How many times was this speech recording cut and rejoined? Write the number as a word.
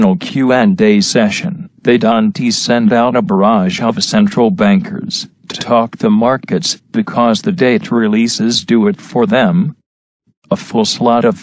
zero